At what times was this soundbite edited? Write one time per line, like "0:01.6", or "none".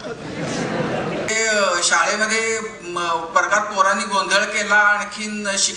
0:01.3